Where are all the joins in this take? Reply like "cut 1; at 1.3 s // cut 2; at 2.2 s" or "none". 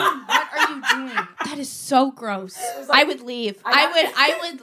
cut 1; at 1.3 s // cut 2; at 2.8 s